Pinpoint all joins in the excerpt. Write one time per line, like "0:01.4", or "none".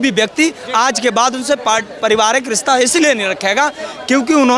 none